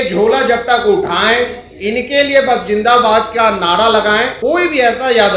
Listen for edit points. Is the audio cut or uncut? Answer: cut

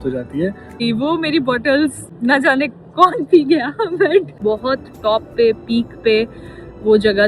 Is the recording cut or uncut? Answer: cut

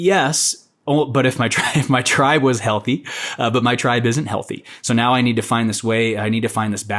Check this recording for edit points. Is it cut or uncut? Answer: uncut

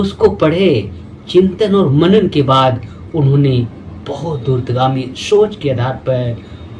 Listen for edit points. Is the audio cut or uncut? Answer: uncut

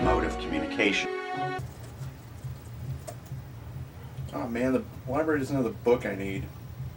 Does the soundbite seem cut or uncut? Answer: cut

